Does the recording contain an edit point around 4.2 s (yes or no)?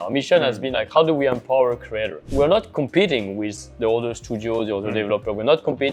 no